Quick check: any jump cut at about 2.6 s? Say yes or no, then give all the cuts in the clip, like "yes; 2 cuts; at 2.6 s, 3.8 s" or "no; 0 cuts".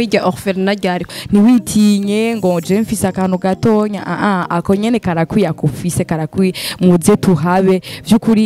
no; 1 cut; at 1.1 s